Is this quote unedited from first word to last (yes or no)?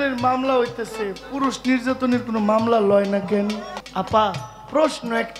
no